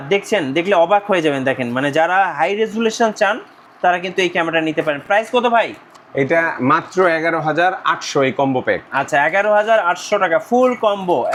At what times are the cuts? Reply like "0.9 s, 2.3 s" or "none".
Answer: none